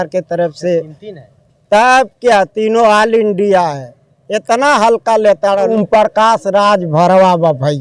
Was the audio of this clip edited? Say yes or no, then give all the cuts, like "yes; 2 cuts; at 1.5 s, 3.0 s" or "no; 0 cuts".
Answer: yes; 1 cut; at 5.7 s